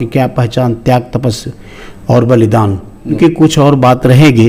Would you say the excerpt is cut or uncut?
cut